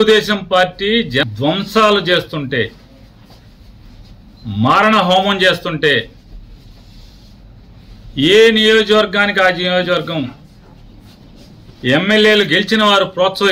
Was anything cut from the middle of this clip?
yes; 1 cut; at 1.3 s

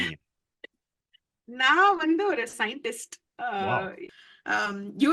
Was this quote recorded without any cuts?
no; 1 cut; at 4.1 s

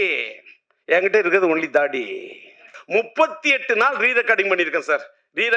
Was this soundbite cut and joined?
yes; 1 cut; at 2.7 s

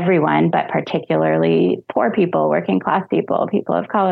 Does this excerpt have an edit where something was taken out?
no; 0 cuts

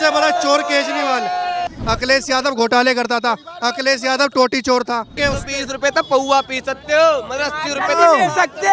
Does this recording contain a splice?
yes; 2 cuts; at 1.7 s, 5.2 s

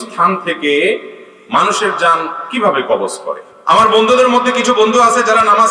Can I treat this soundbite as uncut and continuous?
no; 1 cut; at 3.5 s

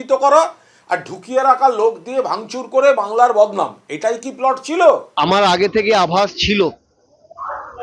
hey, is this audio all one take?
no; 1 cut; at 5.1 s

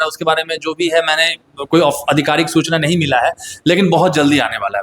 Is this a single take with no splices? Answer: yes; 0 cuts

